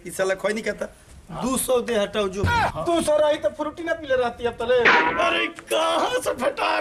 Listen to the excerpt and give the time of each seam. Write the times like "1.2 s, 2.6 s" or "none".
none

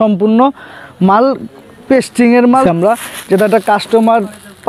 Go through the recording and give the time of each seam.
2.6 s

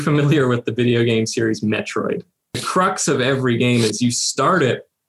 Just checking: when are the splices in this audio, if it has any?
2.6 s

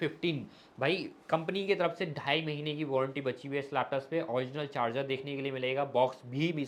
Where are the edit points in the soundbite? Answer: none

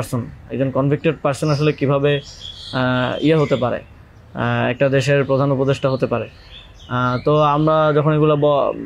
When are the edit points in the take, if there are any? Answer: none

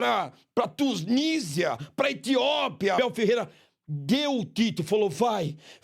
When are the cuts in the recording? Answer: 3.0 s

